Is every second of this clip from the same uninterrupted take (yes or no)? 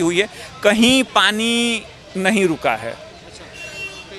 yes